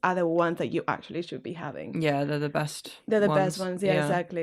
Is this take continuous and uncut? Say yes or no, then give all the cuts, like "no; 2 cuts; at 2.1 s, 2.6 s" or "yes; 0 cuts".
yes; 0 cuts